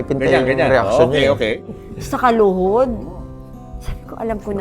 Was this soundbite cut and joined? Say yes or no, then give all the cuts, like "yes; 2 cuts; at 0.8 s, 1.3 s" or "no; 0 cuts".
yes; 1 cut; at 1.6 s